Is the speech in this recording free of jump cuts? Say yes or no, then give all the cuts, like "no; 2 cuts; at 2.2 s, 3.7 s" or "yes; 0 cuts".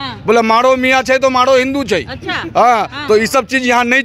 yes; 0 cuts